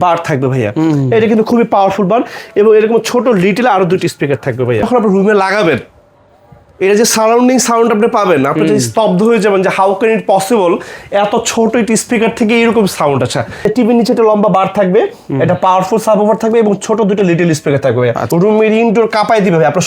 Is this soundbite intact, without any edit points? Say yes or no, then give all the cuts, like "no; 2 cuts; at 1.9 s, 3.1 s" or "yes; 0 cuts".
no; 3 cuts; at 4.8 s, 13.6 s, 18.2 s